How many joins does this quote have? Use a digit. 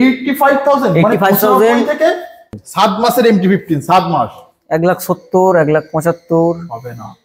1